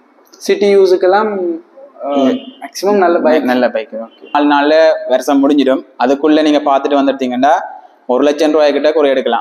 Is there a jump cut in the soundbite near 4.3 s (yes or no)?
yes